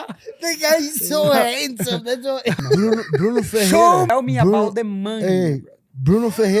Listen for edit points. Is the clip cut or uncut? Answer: cut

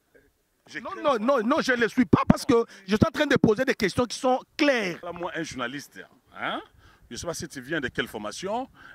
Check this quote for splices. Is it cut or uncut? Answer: cut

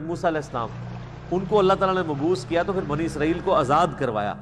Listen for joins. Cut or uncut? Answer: uncut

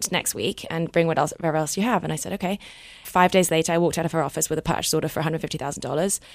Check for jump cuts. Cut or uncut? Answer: cut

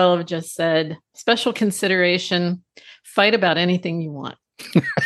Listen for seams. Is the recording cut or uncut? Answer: uncut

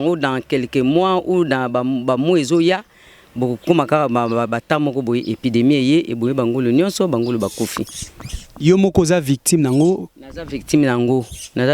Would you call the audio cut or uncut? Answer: uncut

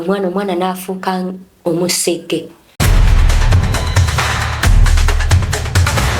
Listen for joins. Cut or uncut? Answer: cut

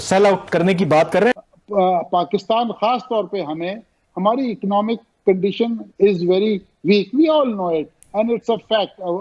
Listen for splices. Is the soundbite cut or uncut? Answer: cut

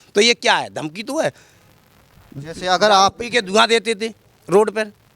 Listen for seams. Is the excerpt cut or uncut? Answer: uncut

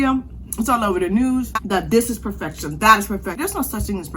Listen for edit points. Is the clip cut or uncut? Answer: cut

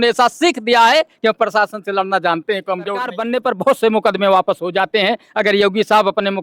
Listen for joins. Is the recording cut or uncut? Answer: cut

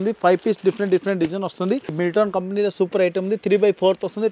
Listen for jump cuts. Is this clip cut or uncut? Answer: cut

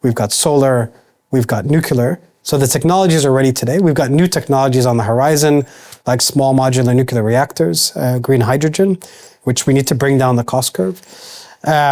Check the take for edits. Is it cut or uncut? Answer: uncut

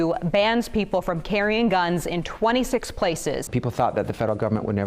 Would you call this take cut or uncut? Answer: cut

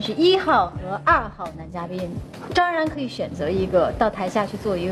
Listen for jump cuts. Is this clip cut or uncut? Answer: uncut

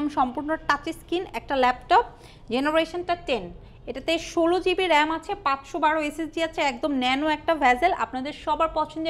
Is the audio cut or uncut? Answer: uncut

